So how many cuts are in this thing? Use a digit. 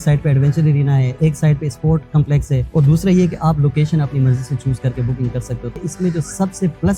1